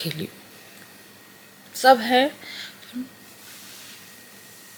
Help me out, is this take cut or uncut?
uncut